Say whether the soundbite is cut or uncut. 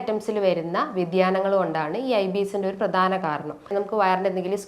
cut